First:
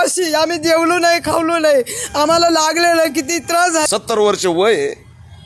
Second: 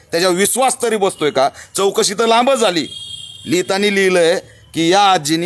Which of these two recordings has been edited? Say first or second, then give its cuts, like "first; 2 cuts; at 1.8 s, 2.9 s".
first; 1 cut; at 3.9 s